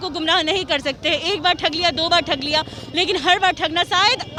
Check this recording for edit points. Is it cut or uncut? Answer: uncut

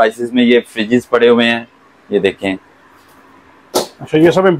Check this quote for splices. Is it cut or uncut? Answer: uncut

